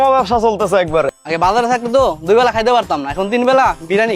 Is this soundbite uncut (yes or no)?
no